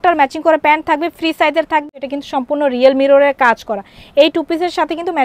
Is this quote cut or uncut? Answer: cut